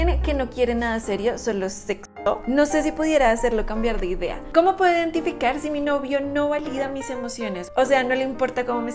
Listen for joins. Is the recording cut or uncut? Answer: cut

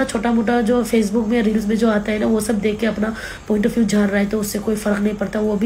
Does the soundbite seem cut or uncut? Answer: uncut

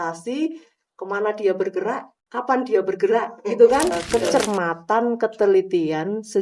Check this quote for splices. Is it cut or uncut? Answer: cut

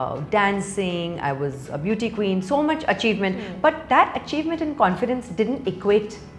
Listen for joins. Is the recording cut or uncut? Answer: uncut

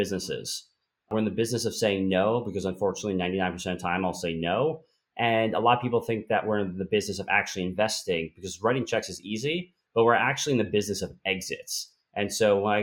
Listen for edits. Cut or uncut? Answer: cut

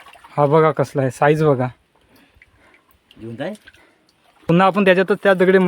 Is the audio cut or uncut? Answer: cut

